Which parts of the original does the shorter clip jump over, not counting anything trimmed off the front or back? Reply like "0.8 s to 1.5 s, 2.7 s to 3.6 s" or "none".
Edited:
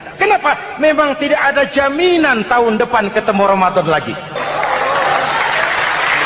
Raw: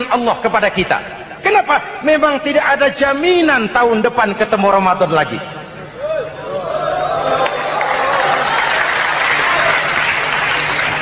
5.6 s to 7.6 s